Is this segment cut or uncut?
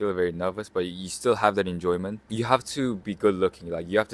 cut